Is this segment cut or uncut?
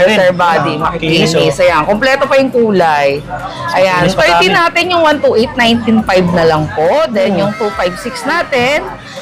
uncut